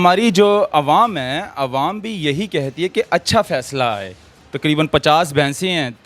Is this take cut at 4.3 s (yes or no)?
yes